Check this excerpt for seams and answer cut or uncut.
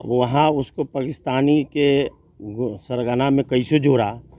uncut